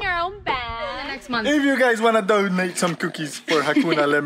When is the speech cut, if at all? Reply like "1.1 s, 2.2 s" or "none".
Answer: 1.2 s